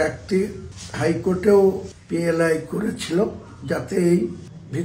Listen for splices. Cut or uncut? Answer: uncut